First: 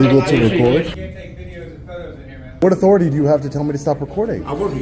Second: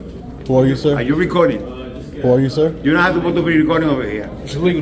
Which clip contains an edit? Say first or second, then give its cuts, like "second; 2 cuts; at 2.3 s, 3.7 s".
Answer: first; 2 cuts; at 0.9 s, 2.6 s